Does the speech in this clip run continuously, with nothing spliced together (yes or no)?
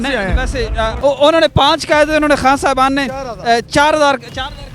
no